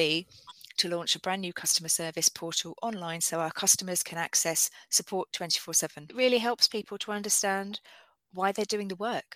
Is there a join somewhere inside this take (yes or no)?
yes